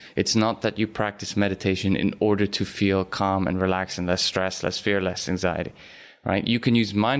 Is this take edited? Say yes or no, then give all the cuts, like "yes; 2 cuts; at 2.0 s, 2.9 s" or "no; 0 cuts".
no; 0 cuts